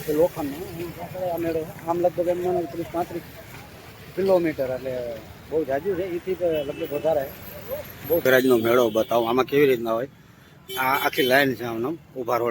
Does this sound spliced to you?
yes; 1 cut; at 8.3 s

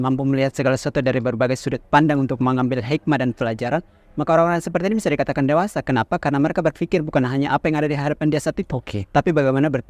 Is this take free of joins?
yes; 0 cuts

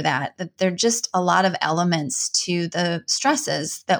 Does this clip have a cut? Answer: no; 0 cuts

